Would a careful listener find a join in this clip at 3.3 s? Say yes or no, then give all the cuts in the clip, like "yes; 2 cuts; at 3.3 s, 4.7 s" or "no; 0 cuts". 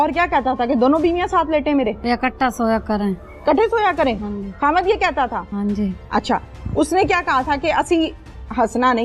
no; 2 cuts; at 2.0 s, 5.5 s